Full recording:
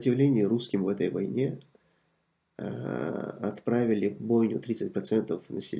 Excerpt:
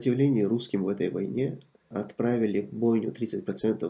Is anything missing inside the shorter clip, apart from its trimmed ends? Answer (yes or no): yes